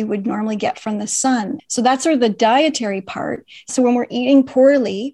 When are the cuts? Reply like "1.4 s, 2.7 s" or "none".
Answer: 1.6 s, 3.7 s